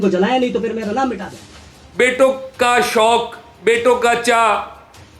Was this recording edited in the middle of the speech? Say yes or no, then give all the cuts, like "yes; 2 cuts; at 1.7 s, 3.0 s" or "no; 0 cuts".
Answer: yes; 1 cut; at 1.8 s